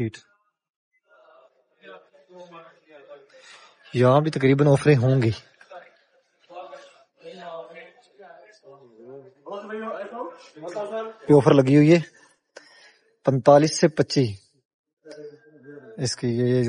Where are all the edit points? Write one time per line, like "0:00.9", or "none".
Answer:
none